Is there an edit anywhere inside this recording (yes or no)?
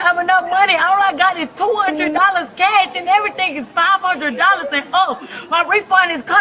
no